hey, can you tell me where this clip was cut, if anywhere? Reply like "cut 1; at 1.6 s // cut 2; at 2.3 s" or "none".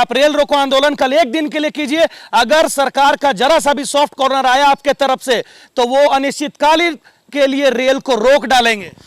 none